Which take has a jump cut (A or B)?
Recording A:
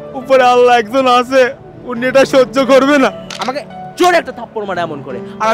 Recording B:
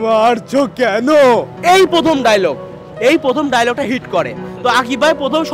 A